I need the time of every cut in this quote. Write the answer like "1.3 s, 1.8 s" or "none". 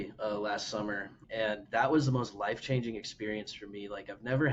1.2 s